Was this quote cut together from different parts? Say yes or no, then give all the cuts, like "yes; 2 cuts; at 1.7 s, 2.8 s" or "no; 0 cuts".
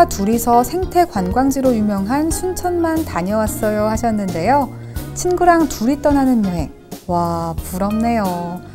no; 0 cuts